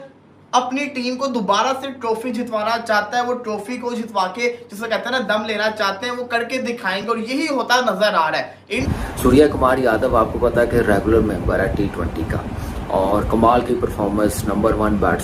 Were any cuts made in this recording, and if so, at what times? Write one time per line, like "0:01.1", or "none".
none

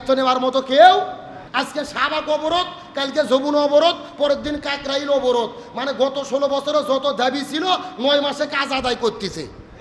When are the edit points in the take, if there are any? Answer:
0:01.4

